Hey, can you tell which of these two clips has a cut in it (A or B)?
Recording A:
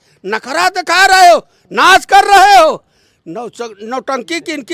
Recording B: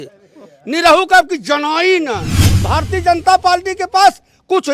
B